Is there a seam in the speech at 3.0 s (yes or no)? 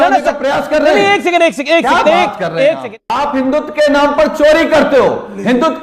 yes